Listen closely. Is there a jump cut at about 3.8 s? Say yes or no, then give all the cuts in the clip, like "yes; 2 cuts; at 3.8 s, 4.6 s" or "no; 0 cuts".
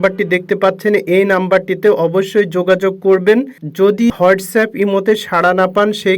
yes; 1 cut; at 3.8 s